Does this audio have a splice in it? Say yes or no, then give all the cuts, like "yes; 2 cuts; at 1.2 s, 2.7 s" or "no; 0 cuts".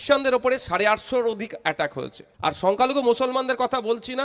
yes; 1 cut; at 2.2 s